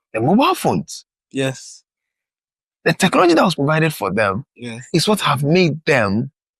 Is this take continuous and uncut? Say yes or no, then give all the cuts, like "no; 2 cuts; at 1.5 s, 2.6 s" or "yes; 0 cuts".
yes; 0 cuts